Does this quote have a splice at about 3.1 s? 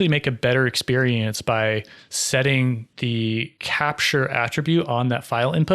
yes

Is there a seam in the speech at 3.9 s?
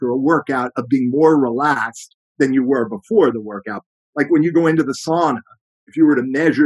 yes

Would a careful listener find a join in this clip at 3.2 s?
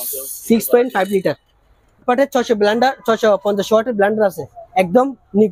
no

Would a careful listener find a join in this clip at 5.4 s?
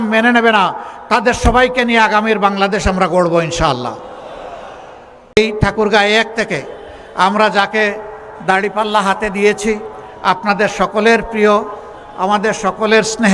yes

